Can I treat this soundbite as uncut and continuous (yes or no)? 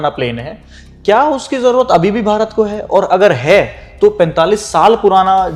yes